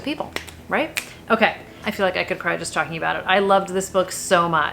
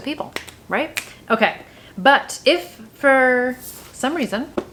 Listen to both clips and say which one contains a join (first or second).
first